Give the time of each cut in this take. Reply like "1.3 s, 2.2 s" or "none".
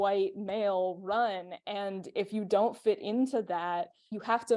none